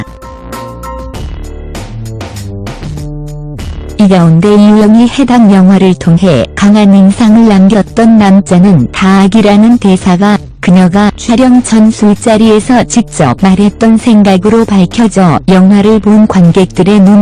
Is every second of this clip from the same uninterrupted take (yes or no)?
yes